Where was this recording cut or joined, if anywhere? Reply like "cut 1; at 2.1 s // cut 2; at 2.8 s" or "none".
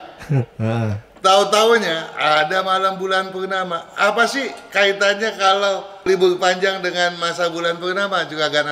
cut 1; at 6.1 s